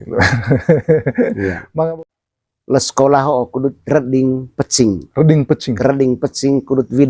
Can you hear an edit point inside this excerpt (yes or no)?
yes